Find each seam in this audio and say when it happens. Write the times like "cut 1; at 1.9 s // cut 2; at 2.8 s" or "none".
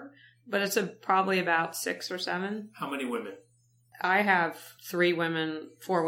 cut 1; at 3.9 s // cut 2; at 4.7 s

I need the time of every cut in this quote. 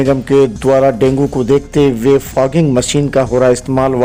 none

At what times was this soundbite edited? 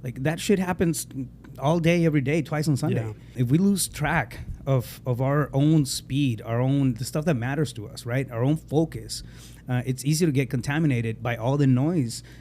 cut 1; at 3.4 s

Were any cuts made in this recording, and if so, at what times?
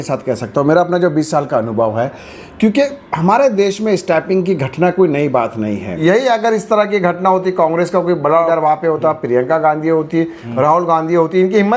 cut 1; at 6.0 s // cut 2; at 8.5 s

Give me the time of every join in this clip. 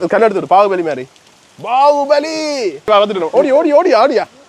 cut 1; at 2.9 s

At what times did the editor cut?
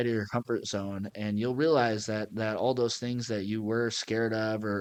none

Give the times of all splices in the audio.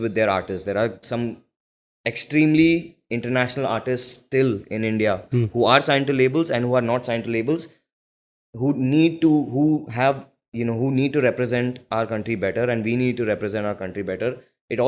none

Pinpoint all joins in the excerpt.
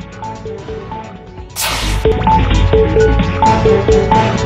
cut 1; at 1.1 s

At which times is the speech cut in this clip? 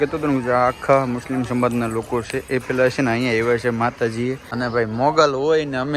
cut 1; at 4.5 s

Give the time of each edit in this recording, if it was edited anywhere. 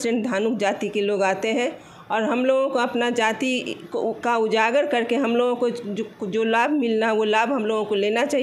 none

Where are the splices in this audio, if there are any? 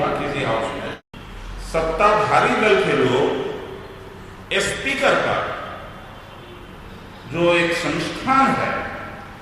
cut 1; at 1.1 s

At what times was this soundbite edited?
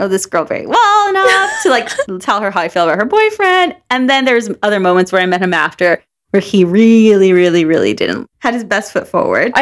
none

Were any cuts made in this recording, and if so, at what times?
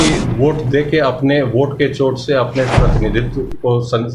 none

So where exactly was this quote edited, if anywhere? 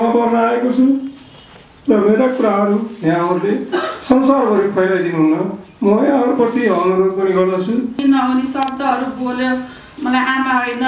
cut 1; at 8.0 s

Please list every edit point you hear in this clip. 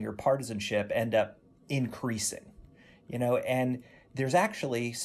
none

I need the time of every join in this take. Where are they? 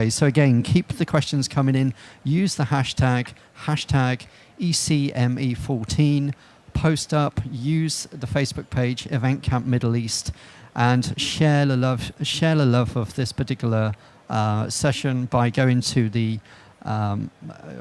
none

